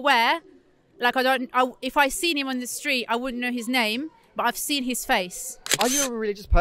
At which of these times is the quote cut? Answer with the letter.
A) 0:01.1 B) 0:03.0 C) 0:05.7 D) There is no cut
C